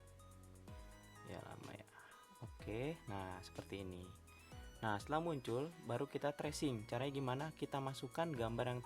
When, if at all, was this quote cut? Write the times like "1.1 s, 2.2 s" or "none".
none